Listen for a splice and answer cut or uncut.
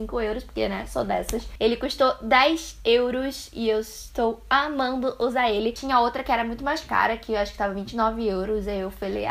cut